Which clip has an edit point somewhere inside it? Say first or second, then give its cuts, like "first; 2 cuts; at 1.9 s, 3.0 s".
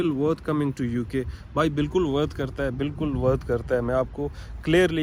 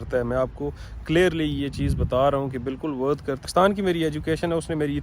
second; 1 cut; at 3.5 s